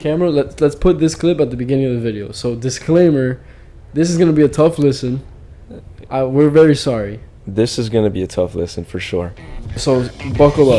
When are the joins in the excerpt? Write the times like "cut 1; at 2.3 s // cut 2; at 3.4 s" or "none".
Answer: cut 1; at 9.8 s